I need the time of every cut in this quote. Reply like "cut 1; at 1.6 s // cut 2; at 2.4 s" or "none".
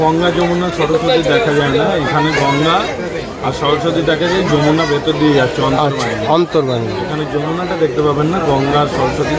none

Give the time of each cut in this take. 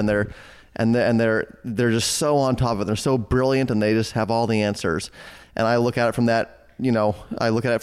none

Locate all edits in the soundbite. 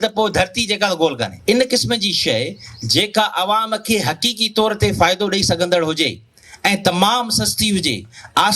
cut 1; at 1.4 s

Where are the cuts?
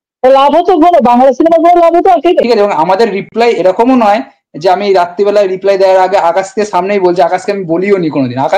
cut 1; at 2.4 s

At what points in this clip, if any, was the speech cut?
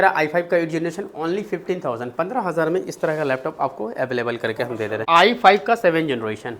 cut 1; at 5.0 s

